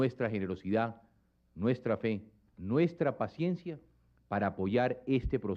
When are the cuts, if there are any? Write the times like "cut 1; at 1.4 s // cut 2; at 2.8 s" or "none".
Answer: none